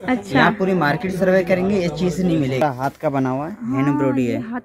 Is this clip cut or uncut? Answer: cut